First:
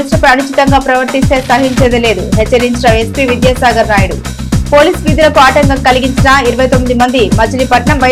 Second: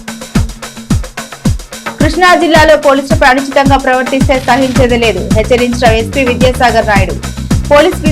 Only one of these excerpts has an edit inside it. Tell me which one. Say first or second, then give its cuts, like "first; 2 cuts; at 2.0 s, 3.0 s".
second; 1 cut; at 2.0 s